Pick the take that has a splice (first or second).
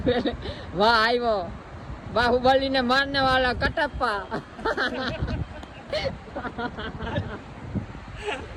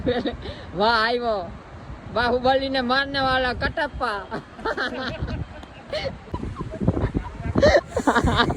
second